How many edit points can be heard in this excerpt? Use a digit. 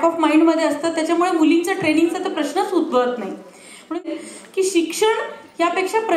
1